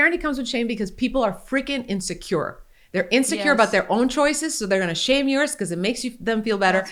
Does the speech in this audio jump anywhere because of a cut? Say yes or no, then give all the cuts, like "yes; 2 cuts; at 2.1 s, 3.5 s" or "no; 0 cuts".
no; 0 cuts